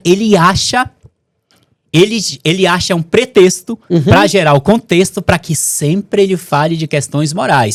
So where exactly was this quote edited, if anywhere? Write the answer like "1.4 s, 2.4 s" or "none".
none